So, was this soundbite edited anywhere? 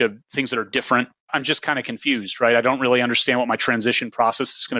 yes; 1 cut; at 1.2 s

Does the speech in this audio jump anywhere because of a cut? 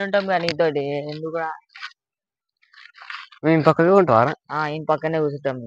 no; 0 cuts

